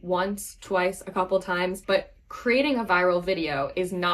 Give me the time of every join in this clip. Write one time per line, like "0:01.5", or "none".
0:01.8